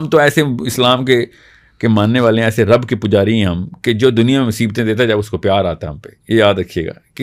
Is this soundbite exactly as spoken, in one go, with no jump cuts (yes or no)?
yes